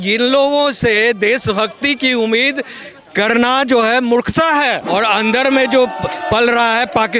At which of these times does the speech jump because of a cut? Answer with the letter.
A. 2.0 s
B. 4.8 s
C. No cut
B